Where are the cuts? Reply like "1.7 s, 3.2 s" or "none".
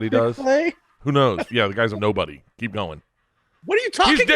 1.8 s